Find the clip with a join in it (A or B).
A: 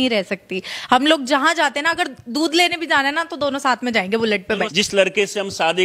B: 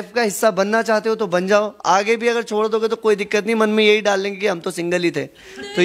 A